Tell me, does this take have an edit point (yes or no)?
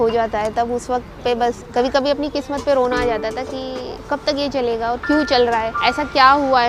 yes